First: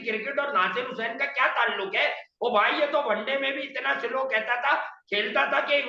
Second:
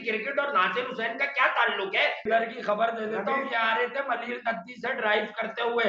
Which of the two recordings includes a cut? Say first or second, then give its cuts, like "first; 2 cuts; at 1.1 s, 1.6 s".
second; 1 cut; at 2.2 s